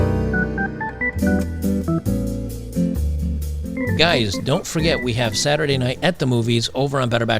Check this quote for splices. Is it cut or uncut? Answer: cut